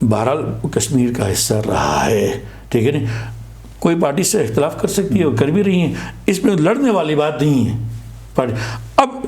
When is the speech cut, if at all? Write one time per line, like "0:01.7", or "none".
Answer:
none